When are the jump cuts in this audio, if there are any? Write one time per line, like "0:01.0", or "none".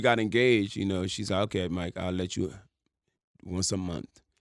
none